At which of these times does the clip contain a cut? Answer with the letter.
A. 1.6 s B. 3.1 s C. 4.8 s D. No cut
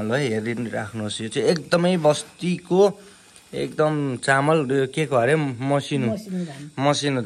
D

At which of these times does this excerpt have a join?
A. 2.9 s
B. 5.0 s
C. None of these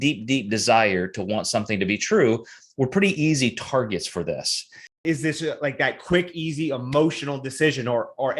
B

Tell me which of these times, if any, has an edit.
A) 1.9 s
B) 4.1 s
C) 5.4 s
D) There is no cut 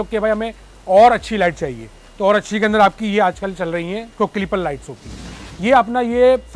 C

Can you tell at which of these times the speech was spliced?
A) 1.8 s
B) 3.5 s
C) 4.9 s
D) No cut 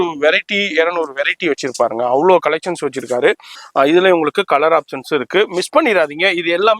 B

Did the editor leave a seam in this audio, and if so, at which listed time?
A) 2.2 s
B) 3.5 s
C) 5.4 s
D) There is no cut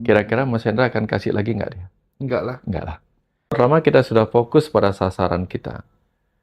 B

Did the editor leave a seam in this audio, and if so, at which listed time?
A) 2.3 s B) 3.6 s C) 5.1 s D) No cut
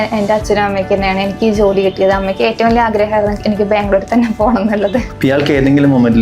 C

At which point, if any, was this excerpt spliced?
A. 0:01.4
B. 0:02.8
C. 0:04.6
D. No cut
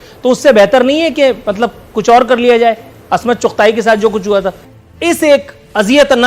C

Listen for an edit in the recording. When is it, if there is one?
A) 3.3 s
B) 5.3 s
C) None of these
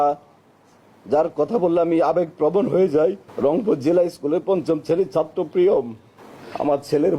C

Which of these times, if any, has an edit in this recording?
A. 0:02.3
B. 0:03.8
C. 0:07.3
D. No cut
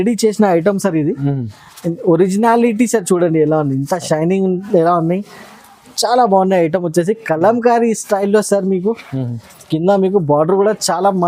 D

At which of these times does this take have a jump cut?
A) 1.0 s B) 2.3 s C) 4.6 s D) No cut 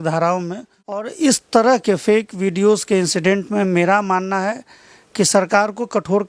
A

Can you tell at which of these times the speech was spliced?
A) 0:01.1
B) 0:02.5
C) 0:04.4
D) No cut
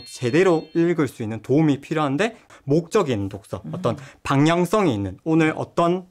B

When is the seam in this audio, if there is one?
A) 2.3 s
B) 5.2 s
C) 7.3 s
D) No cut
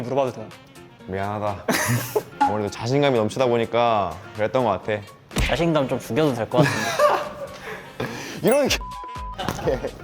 B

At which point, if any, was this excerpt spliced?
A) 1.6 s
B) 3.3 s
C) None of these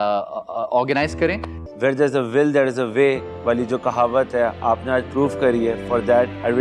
A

